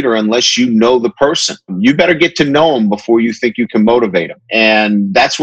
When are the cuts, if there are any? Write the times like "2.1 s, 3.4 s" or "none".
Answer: 1.7 s, 4.4 s

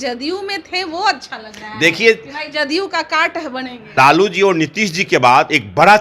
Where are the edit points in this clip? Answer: 3.8 s

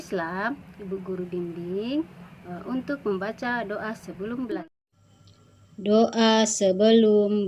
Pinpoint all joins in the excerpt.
4.6 s

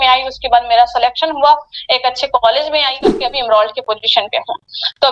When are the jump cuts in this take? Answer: 3.2 s

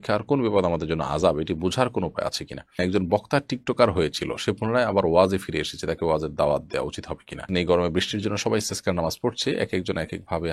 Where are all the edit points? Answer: 2.8 s, 7.5 s

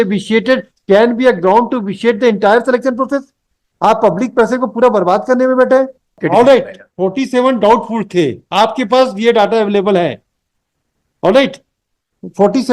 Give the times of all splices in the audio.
6.0 s

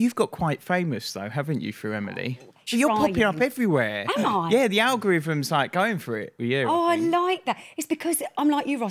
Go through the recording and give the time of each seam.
2.6 s

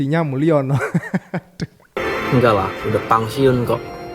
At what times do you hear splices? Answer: 2.0 s

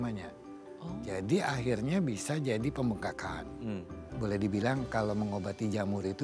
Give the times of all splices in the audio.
4.0 s

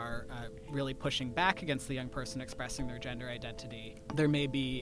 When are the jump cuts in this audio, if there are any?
3.9 s

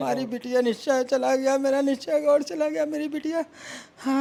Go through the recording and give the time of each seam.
none

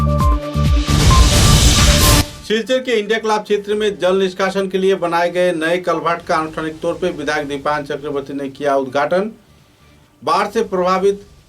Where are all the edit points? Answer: 2.3 s

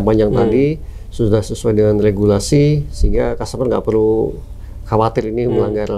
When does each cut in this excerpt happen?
none

